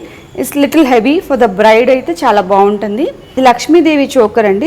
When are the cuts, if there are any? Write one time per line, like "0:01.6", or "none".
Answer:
0:03.4